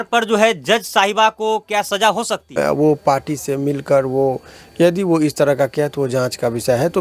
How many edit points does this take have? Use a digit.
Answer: 1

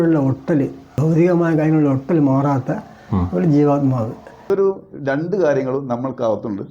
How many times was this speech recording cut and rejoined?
2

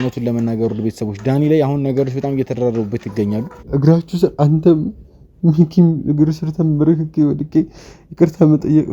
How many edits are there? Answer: 1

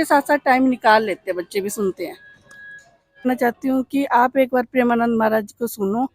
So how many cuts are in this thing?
1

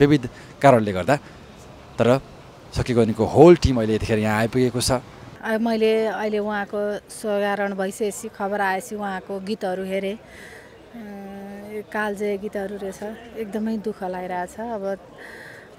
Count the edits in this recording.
1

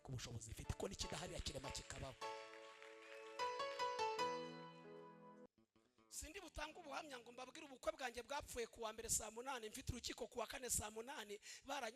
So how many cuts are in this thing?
1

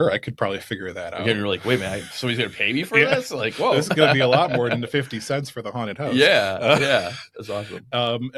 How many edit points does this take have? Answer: 0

